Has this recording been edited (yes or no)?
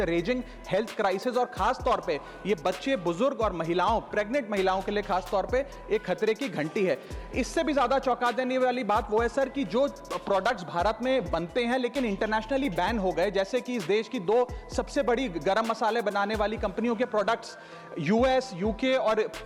no